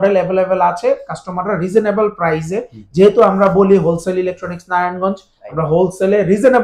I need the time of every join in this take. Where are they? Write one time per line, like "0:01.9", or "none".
none